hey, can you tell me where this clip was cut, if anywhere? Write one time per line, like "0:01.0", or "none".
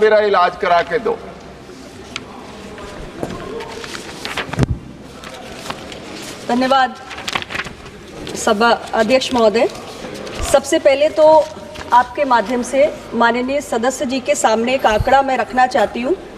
none